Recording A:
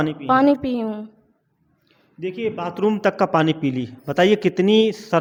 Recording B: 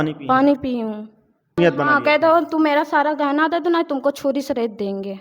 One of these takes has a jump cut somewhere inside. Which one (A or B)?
B